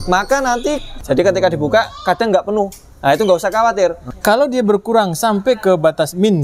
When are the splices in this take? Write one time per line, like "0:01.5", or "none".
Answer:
0:00.9
0:04.1